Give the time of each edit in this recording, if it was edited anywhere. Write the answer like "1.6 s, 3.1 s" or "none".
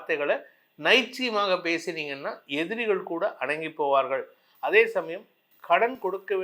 none